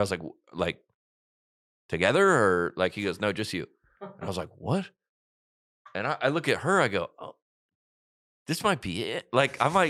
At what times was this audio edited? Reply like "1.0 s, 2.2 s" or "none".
none